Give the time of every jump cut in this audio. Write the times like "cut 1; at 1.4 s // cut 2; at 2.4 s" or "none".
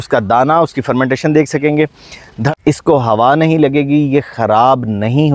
cut 1; at 2.4 s